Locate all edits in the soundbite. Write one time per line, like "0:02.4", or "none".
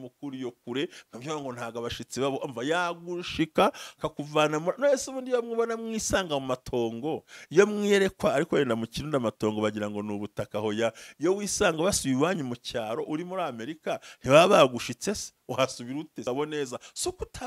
0:16.2